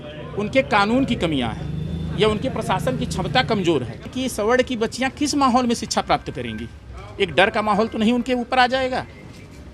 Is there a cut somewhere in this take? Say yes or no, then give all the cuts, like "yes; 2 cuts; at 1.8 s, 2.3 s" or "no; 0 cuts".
yes; 1 cut; at 4.1 s